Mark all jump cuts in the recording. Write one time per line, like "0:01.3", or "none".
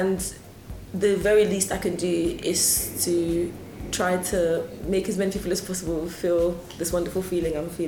0:03.7